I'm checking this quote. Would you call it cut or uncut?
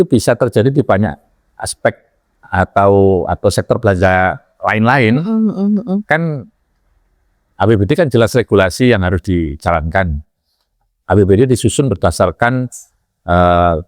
uncut